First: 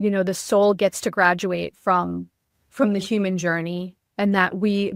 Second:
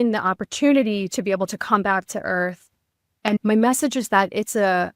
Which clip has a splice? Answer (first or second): second